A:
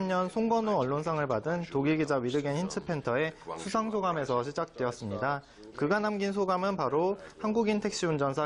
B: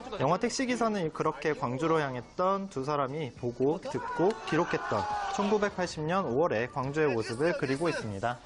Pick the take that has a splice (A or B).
A